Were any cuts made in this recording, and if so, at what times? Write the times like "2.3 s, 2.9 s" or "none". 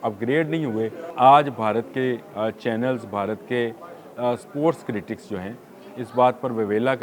1.0 s